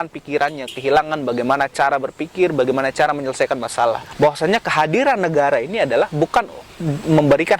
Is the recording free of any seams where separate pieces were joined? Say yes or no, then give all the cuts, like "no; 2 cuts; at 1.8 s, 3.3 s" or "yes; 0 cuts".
no; 1 cut; at 4.1 s